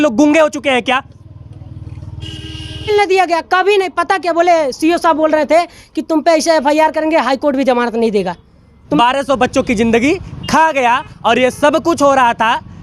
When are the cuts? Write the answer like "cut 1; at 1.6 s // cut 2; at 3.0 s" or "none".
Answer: cut 1; at 2.9 s // cut 2; at 9.0 s